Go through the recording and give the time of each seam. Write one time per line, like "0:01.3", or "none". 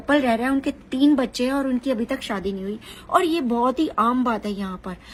none